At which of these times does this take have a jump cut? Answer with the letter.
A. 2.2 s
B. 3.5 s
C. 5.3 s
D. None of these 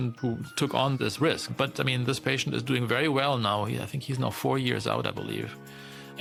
D